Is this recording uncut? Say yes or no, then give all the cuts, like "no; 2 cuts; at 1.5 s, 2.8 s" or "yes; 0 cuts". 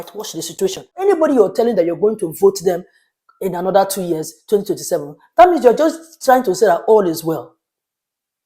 no; 1 cut; at 0.9 s